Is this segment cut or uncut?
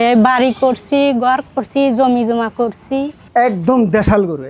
cut